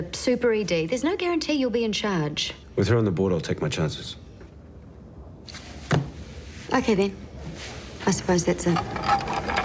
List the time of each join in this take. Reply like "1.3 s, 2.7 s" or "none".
3.5 s